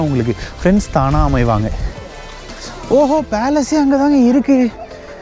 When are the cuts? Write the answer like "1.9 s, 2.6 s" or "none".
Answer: 1.9 s